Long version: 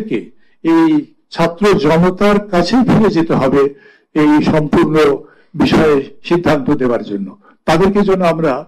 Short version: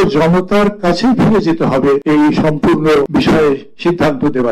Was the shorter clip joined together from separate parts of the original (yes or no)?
yes